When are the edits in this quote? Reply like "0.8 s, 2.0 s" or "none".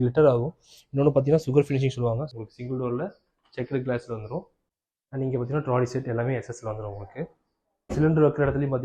2.3 s, 4.6 s, 7.9 s